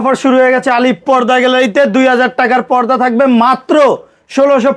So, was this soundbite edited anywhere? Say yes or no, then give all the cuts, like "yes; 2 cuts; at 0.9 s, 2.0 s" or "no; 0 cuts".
no; 0 cuts